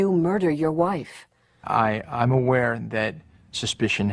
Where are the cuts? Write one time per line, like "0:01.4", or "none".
0:01.7